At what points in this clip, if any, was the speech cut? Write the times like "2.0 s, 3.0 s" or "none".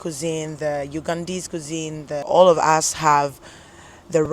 2.3 s